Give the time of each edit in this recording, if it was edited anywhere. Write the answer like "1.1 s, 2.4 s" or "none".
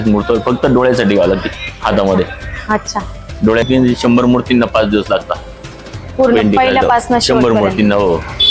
3.7 s